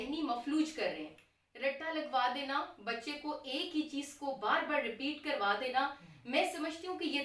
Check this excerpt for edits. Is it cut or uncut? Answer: uncut